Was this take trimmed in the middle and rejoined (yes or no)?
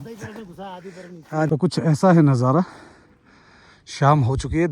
yes